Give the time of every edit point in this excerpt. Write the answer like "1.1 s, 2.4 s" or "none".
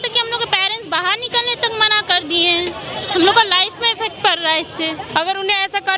5.0 s